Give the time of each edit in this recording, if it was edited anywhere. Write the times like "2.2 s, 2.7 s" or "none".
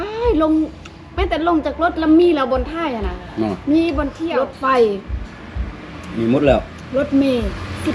4.2 s